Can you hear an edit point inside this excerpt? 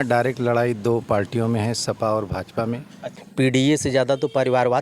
yes; 1 cut; at 3.2 s

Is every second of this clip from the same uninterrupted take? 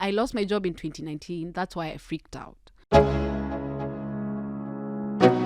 no; 1 cut; at 2.8 s

